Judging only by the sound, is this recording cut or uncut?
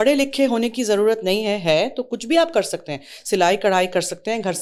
uncut